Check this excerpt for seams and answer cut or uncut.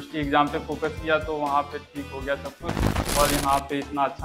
cut